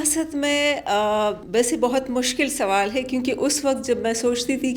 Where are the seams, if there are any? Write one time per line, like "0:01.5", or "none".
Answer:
0:01.4